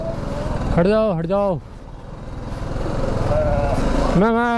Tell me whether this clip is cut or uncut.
uncut